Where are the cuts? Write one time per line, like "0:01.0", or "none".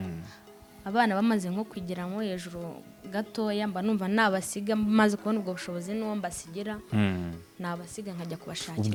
none